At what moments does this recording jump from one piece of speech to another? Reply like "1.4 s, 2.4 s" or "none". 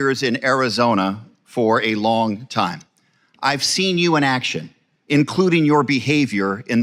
none